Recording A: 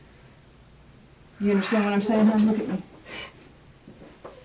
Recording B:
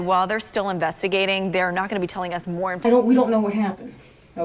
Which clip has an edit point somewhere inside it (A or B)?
B